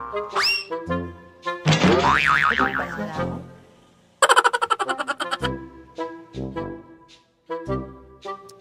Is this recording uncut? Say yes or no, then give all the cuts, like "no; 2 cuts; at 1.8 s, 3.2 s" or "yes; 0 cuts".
yes; 0 cuts